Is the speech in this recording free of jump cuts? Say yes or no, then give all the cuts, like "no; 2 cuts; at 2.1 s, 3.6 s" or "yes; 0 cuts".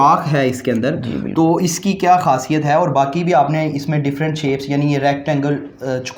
yes; 0 cuts